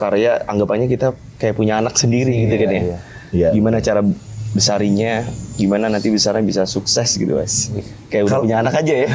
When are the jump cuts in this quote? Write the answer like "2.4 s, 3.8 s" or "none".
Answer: none